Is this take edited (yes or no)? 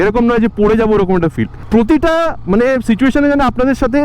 yes